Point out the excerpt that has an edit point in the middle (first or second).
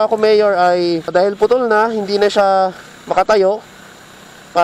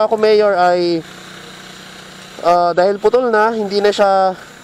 first